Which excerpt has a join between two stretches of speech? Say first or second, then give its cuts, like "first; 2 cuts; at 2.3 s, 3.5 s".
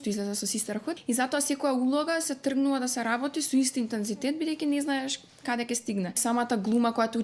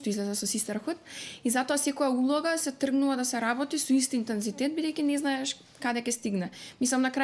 first; 2 cuts; at 1.0 s, 6.2 s